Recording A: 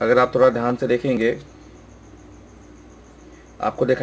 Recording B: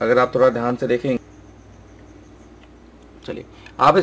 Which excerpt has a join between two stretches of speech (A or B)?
B